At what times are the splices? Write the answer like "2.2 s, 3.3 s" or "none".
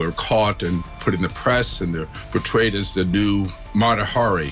0.9 s, 3.6 s

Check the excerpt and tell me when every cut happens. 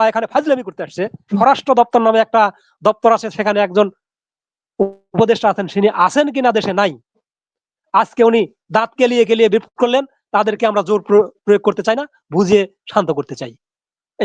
1.4 s

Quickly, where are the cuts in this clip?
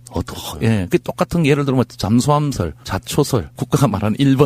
2.5 s

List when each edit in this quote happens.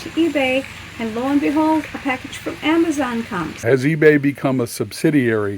3.6 s

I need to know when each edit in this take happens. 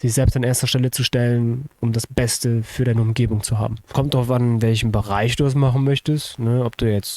3.9 s

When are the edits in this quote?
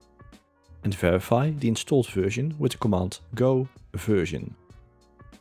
0.8 s, 3.2 s, 4.5 s

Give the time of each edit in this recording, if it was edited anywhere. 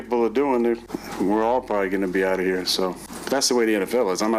1.0 s, 3.1 s

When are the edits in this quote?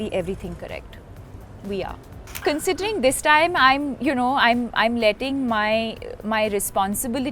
2.4 s

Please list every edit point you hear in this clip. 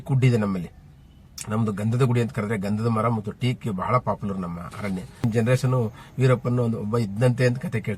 5.2 s

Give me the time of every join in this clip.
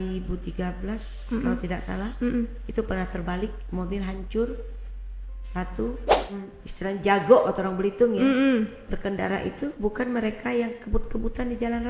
6.4 s

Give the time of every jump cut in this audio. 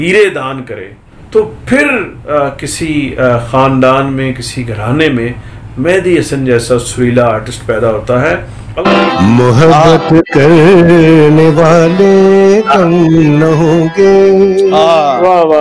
8.7 s

